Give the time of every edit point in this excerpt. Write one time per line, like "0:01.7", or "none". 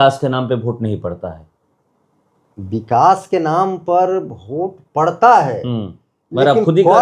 none

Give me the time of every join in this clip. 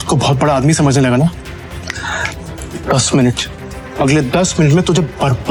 none

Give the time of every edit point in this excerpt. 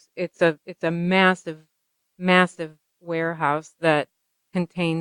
none

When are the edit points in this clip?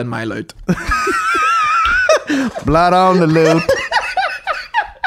none

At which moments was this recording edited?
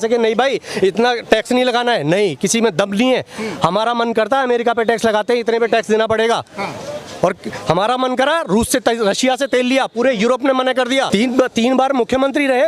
0:11.1

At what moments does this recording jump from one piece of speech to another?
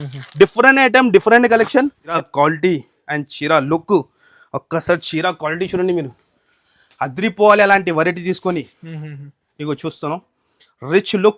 0:02.1

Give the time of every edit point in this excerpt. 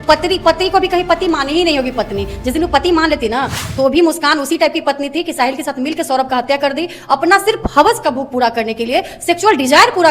0:03.6

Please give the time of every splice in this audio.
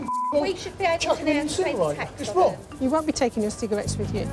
0:02.6

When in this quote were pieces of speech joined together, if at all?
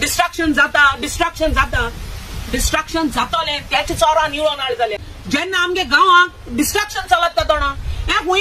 0:04.9

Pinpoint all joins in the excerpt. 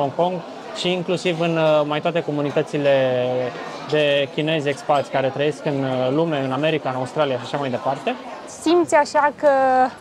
0:08.5

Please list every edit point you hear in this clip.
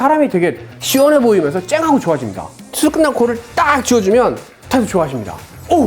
0:02.7

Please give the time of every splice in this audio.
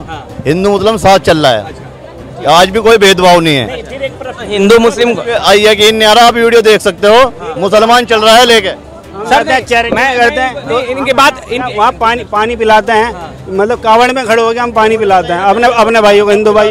none

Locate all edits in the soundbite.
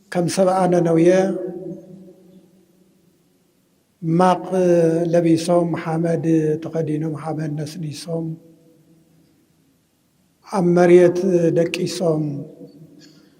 none

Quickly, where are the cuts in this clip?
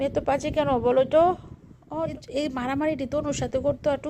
0:02.1

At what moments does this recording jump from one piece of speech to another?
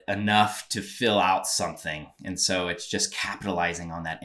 none

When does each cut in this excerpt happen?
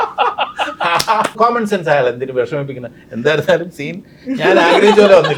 0:01.4

